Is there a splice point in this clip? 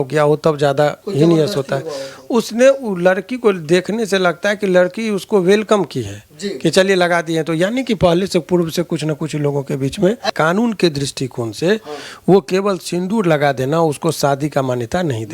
yes; 1 cut; at 10.3 s

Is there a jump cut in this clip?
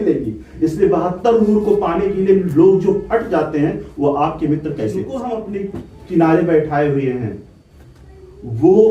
yes; 1 cut; at 5.4 s

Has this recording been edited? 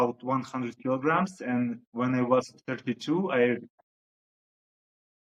no; 0 cuts

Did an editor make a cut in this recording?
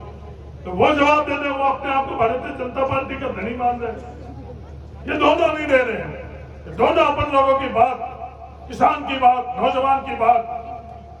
no; 0 cuts

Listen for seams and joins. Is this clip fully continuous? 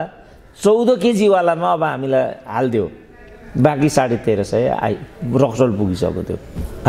yes; 0 cuts

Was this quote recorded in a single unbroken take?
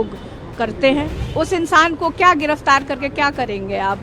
no; 1 cut; at 1.2 s

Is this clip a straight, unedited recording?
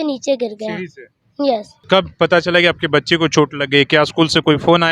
no; 1 cut; at 1.7 s

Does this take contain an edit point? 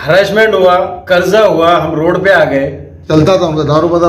yes; 1 cut; at 3.1 s

